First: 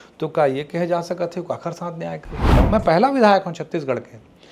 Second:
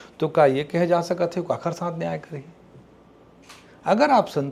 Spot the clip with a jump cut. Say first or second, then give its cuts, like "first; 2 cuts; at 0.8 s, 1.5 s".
first; 1 cut; at 2.5 s